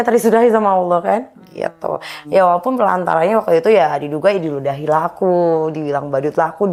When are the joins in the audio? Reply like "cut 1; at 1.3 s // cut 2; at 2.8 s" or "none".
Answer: none